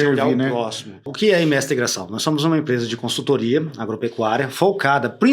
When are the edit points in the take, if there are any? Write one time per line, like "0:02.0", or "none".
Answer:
0:01.1